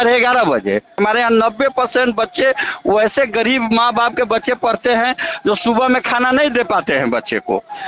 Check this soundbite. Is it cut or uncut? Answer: cut